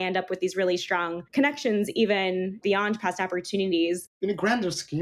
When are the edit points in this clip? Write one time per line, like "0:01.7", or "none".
0:02.6
0:04.1

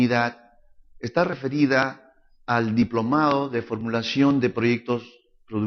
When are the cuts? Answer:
0:03.0

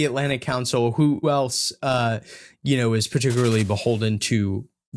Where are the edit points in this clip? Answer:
0:01.2

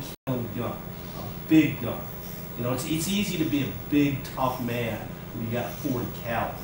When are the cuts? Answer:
none

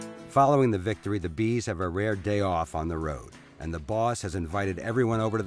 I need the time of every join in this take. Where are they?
none

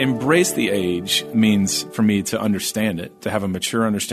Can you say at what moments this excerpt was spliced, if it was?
0:01.2

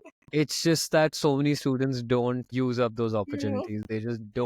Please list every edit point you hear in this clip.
0:02.5

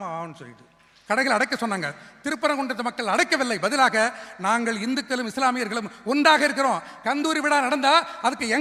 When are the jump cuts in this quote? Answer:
none

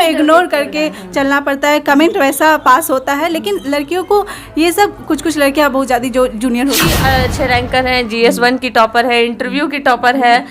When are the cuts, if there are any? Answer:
0:06.9

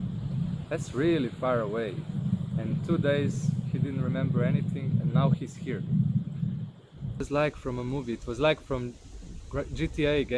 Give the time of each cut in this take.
0:07.2

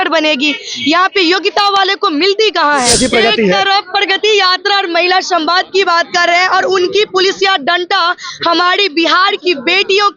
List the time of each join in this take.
0:02.9

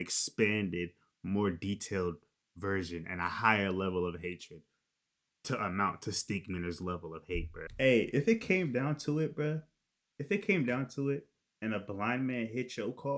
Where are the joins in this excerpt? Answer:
0:07.6

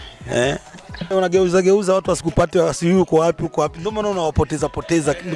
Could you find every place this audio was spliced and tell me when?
0:01.0

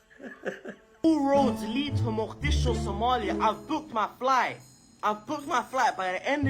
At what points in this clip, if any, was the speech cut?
0:01.0

